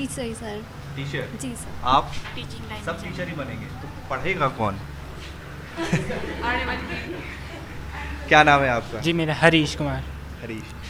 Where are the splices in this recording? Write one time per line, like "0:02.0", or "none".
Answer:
none